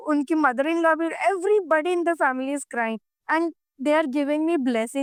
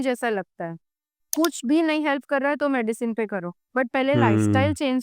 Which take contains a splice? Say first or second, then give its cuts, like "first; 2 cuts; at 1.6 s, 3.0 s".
second; 1 cut; at 1.3 s